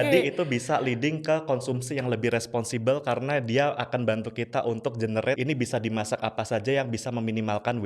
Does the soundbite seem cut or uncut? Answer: cut